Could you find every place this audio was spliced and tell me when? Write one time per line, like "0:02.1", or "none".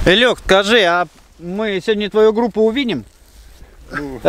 none

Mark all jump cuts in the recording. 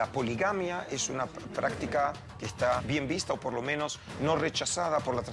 0:02.8

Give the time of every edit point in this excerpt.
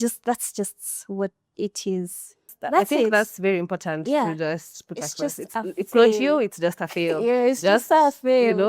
0:02.6

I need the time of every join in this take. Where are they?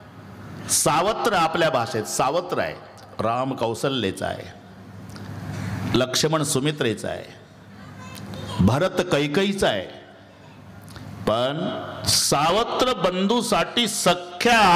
0:12.1

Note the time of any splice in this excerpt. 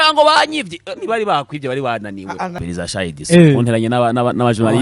0:02.6

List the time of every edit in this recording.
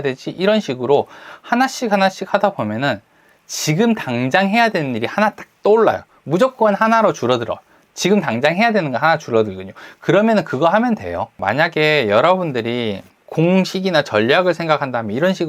0:11.4
0:13.2

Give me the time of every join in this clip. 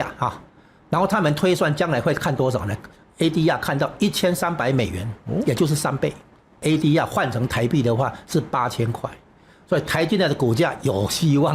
0:06.6

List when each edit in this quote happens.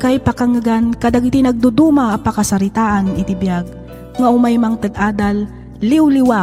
none

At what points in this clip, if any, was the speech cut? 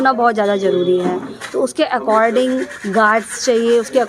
none

